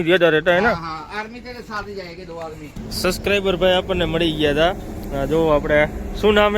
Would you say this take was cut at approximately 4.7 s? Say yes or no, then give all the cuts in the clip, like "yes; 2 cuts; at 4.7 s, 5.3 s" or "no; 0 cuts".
no; 1 cut; at 2.6 s